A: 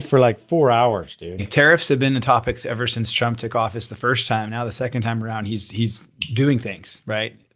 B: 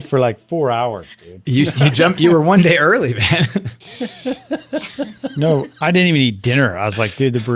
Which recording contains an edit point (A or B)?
A